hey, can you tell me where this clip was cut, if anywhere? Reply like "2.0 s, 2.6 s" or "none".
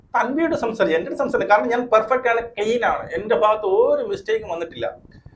none

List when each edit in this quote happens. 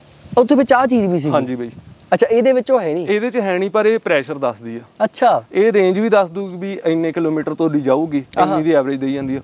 none

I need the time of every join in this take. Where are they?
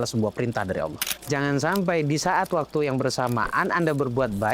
1.1 s

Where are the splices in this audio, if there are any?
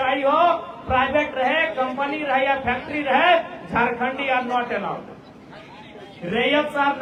none

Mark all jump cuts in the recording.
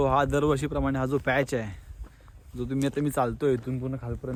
none

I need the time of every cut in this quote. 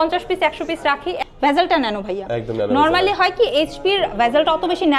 1.2 s

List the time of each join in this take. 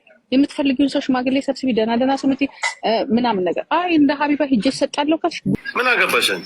5.5 s

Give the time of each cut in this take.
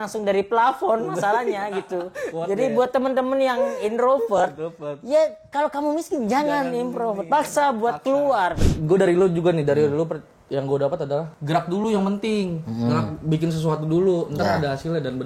2.3 s, 8.6 s, 11.3 s

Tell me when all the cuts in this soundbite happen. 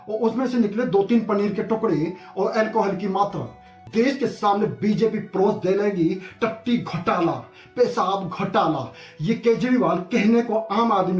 3.8 s

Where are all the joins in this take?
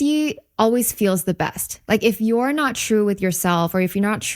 none

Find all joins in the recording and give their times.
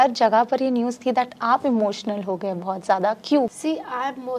3.5 s

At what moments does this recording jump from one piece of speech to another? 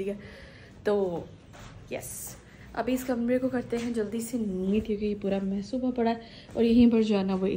none

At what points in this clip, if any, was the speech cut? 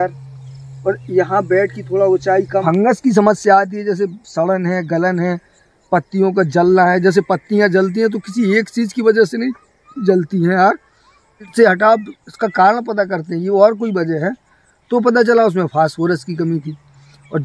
2.6 s, 11.5 s

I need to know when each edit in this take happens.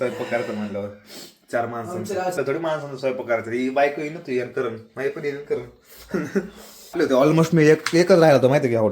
2.3 s, 6.9 s

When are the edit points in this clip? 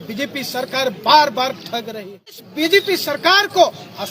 2.4 s

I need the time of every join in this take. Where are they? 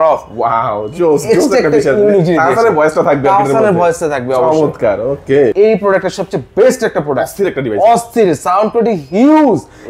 5.5 s

